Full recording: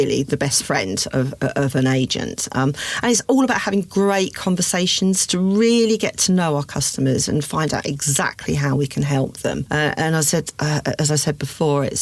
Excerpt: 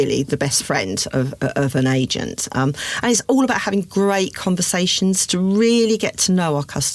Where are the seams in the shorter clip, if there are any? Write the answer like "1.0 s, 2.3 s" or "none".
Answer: none